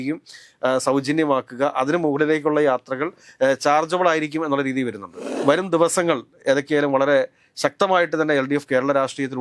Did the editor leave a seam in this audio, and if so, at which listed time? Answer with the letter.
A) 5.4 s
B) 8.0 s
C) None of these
A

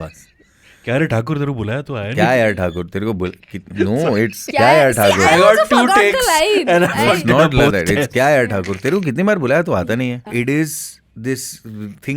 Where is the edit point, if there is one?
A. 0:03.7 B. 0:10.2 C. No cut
B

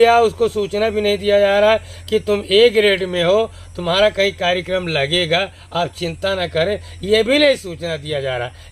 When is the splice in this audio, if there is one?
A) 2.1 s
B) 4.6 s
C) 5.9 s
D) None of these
D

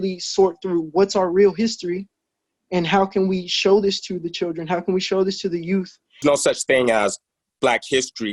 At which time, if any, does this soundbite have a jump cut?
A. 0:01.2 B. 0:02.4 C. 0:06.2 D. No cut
C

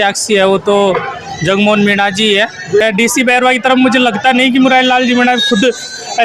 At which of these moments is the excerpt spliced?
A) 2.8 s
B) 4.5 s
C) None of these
A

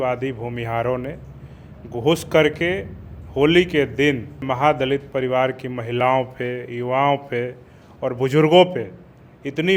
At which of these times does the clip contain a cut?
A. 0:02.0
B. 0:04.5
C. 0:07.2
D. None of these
B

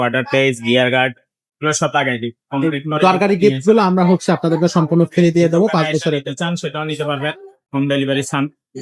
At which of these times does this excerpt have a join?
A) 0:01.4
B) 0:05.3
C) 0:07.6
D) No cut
C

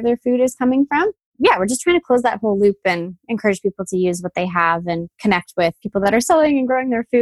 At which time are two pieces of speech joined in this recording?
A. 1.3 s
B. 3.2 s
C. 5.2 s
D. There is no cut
A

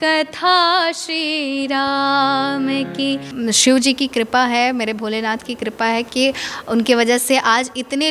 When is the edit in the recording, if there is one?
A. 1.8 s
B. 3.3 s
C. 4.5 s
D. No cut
B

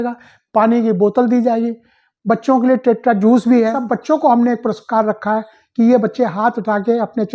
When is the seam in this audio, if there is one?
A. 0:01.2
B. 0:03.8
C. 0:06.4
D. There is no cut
B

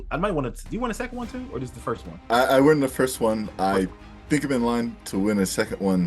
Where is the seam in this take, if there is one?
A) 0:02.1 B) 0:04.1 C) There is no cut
A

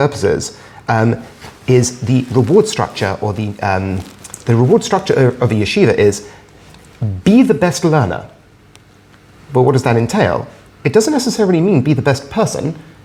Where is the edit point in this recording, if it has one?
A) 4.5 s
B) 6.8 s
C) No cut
C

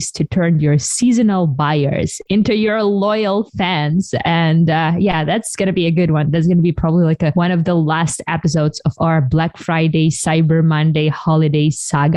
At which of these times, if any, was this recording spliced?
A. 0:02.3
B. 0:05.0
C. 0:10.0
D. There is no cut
A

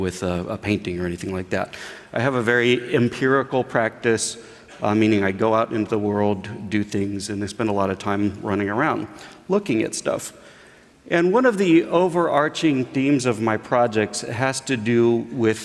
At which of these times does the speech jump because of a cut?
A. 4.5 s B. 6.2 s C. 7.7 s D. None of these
C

